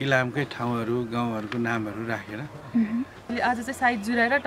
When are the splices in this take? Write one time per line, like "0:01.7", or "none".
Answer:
0:03.3

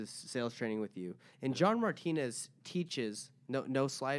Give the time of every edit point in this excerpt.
none

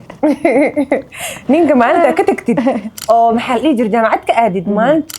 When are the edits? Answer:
0:02.9

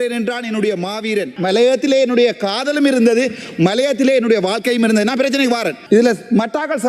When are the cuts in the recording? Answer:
0:01.3
0:05.8

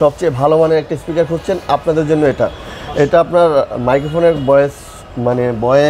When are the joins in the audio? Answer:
none

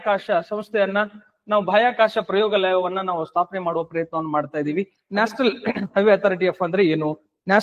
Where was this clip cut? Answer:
0:05.0

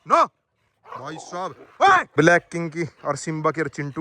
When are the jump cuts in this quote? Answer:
0:02.1

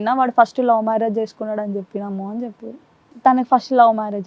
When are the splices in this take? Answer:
0:03.0

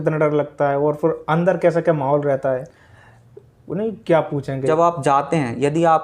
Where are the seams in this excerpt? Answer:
0:04.4

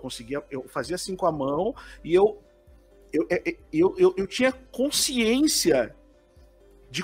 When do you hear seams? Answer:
none

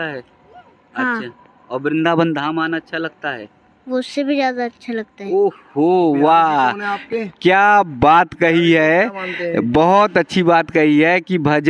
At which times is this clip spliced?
none

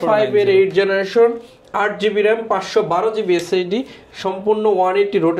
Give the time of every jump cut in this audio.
none

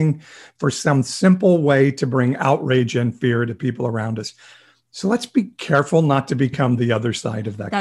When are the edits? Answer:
none

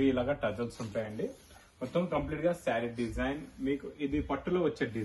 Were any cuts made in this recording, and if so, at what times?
none

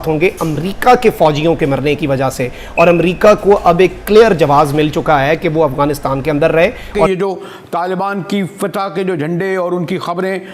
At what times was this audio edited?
0:07.1

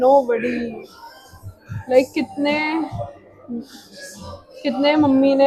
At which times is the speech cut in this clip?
none

